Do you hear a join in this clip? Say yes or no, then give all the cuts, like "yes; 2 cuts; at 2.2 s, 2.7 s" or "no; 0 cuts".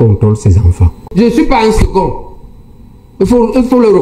yes; 1 cut; at 0.9 s